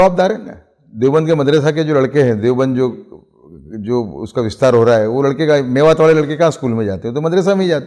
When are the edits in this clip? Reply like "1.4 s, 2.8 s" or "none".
none